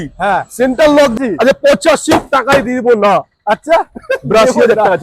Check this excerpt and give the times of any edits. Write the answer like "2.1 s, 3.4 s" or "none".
1.2 s